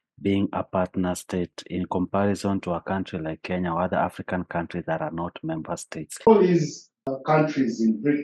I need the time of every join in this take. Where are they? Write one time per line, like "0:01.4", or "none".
0:06.3

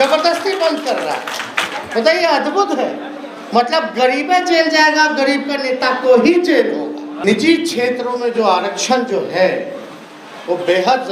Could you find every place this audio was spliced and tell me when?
0:07.2

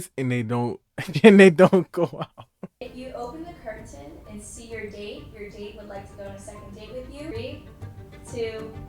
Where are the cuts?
0:03.0
0:07.3

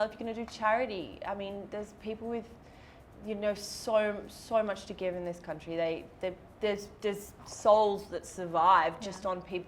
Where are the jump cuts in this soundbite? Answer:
none

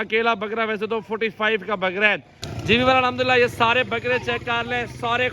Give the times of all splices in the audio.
0:02.4

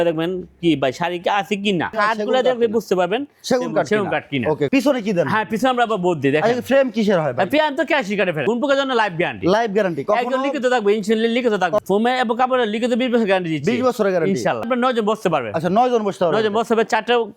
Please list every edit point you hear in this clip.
0:01.9
0:04.7
0:08.4
0:11.8
0:14.7

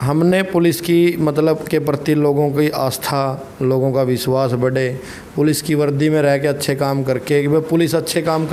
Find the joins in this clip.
none

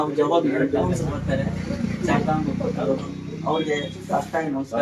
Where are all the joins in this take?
0:00.9

